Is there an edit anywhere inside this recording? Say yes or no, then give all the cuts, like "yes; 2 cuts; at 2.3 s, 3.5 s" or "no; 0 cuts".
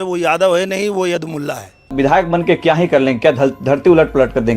yes; 1 cut; at 1.9 s